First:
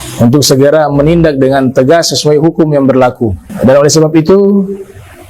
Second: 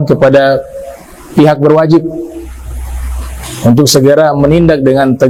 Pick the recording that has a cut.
first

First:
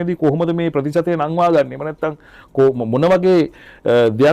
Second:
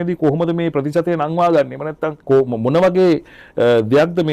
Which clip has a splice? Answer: second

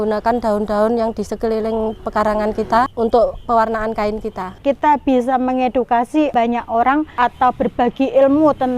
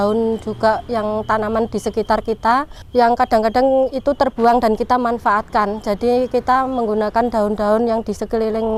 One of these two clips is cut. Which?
first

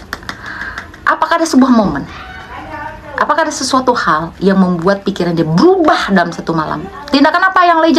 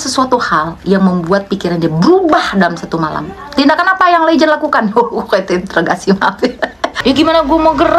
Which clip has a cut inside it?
second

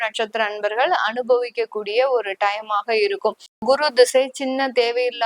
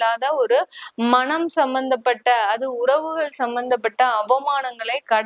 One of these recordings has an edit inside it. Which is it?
first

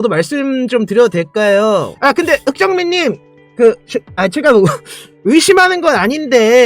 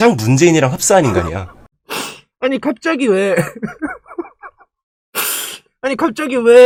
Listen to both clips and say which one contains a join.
first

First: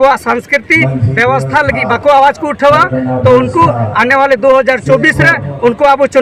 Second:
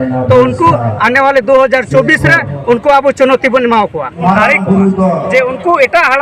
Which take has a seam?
second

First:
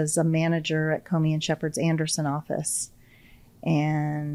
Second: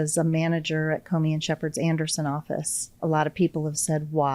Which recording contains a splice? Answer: second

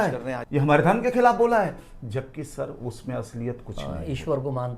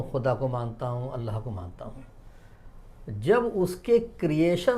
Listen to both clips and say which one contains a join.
first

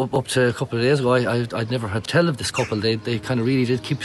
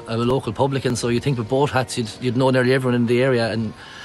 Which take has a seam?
first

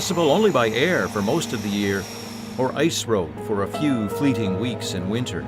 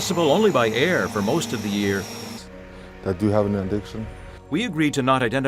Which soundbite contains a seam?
first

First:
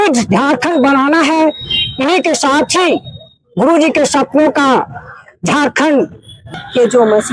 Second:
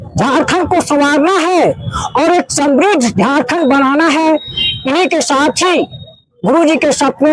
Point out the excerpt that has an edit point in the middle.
first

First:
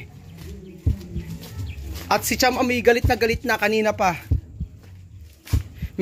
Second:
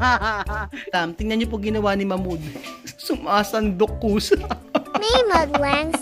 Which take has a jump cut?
second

